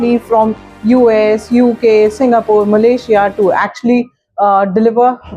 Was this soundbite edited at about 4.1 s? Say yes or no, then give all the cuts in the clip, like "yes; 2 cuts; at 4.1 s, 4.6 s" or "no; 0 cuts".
no; 0 cuts